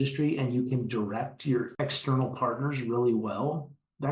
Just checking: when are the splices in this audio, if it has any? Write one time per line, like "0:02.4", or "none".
0:01.7